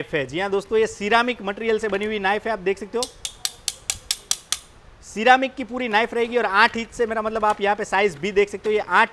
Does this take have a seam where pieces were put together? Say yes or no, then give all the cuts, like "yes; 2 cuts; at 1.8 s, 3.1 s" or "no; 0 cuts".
no; 0 cuts